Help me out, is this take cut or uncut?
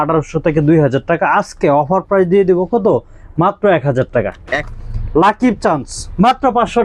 cut